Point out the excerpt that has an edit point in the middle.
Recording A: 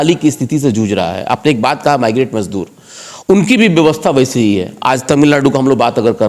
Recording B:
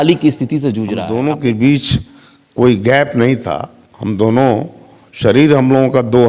B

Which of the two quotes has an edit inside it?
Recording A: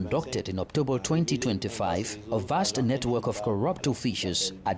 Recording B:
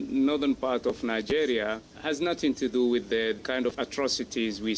B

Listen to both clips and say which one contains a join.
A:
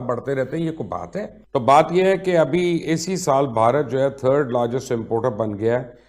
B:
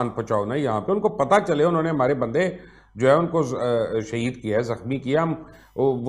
A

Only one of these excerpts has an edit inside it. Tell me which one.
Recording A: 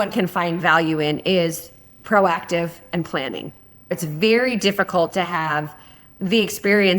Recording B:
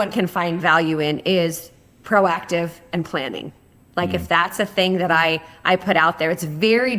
A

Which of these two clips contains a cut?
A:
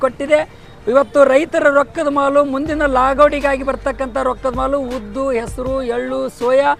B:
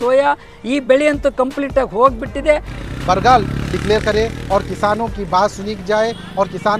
B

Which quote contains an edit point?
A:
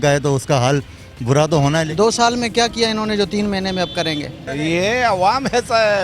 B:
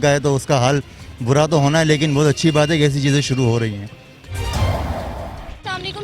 A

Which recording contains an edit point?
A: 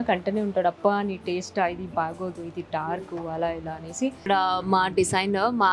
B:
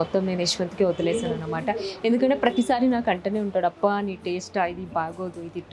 A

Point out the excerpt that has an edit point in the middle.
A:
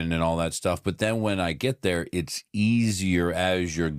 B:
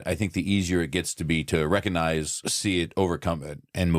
B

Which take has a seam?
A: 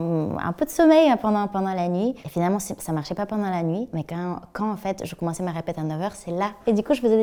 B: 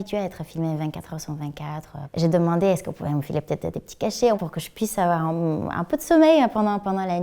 B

